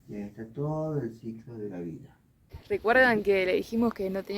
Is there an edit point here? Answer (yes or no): yes